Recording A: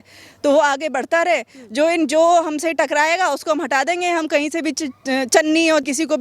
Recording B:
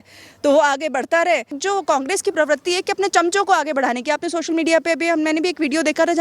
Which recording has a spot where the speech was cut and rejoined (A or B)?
B